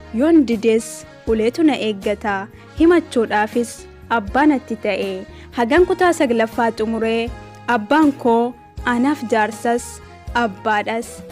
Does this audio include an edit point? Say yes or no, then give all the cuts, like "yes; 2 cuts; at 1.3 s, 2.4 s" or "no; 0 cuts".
no; 0 cuts